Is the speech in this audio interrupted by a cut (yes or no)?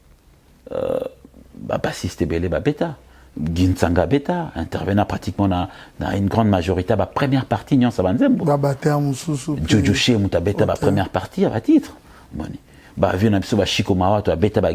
no